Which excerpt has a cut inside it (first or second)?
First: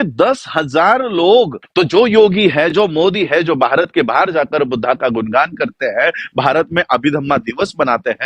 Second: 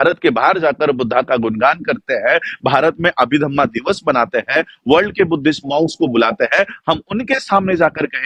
first